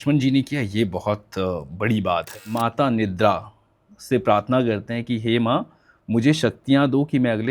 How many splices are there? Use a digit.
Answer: 1